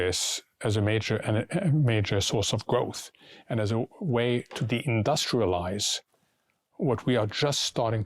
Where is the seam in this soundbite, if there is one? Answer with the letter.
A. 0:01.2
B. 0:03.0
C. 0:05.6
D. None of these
D